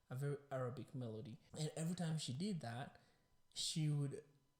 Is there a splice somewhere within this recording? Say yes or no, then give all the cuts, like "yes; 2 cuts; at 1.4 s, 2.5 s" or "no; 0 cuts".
yes; 1 cut; at 1.4 s